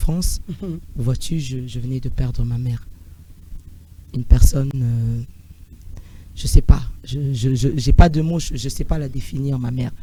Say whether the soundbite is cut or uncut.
uncut